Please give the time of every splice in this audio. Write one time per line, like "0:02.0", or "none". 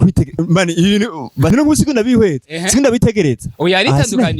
0:01.5

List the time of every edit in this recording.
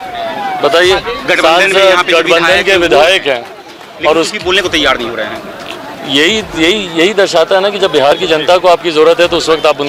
none

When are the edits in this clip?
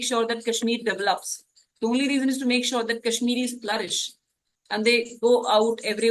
none

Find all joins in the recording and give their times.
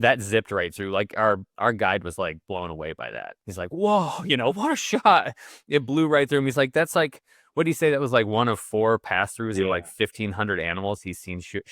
0:03.4

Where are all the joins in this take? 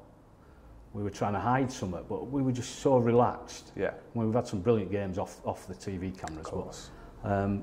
none

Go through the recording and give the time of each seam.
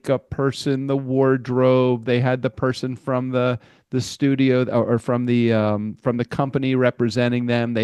none

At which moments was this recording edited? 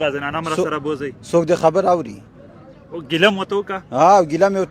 none

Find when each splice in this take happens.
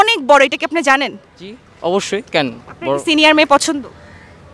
none

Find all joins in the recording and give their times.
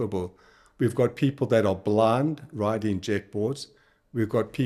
none

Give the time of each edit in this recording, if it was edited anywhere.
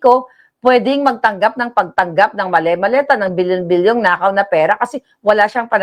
none

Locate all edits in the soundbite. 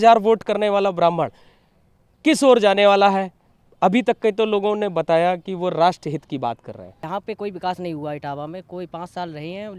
0:07.0

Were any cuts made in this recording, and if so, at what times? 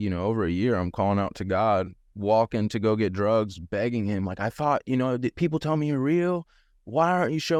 none

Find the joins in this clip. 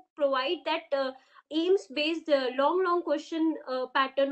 none

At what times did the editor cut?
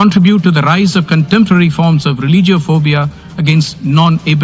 none

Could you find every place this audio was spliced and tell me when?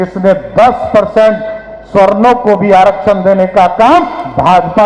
none

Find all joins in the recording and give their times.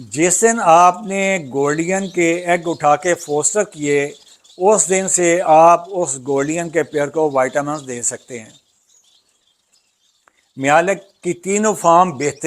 none

